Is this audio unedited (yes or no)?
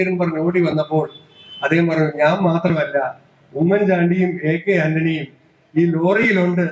yes